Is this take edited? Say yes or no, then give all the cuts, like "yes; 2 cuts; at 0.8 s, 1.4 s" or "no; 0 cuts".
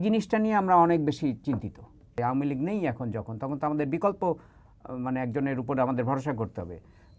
yes; 1 cut; at 2.2 s